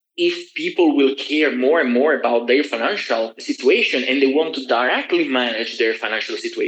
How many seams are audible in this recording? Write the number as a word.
one